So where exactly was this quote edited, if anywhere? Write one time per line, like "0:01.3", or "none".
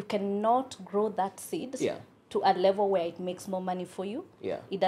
none